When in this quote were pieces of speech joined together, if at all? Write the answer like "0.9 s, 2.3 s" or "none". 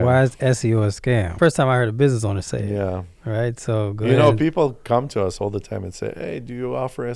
1.3 s